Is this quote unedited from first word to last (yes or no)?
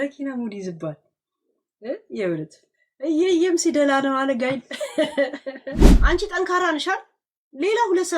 no